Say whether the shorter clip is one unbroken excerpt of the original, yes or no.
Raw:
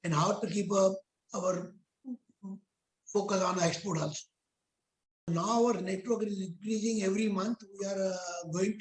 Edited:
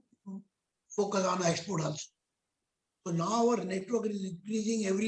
yes